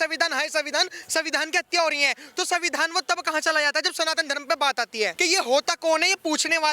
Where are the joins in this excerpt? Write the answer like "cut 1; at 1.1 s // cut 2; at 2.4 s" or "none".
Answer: cut 1; at 5.1 s